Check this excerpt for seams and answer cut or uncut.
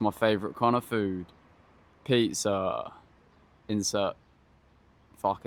uncut